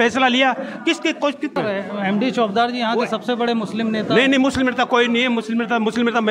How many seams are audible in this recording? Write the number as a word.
one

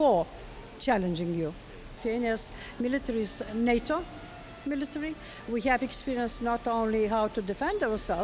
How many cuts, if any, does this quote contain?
one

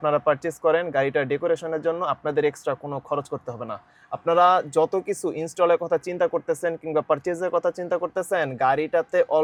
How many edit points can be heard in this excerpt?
zero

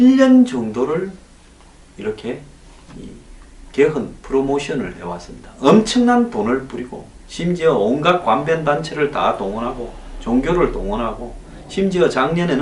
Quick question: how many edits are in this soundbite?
one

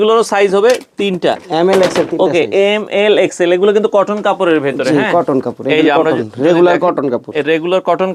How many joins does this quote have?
zero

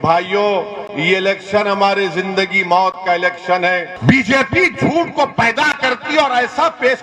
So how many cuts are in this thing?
one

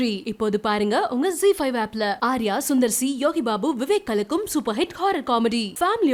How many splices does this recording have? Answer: zero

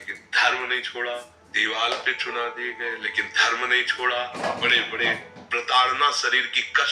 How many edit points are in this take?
two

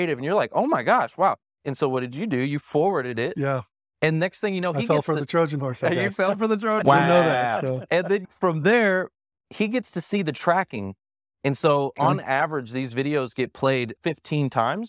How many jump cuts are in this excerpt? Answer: two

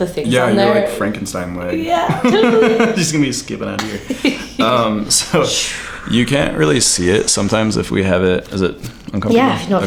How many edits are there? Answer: zero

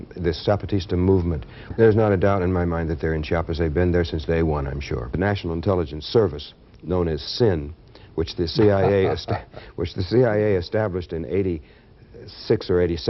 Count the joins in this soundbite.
two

